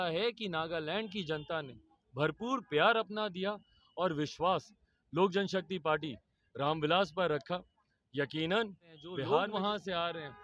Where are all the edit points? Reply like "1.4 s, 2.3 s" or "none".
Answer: 9.2 s